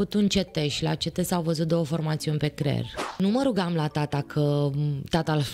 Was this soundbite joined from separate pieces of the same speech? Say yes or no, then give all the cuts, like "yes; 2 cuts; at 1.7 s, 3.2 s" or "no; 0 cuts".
yes; 1 cut; at 3.2 s